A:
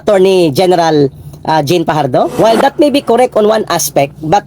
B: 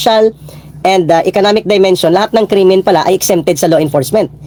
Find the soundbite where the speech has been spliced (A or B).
A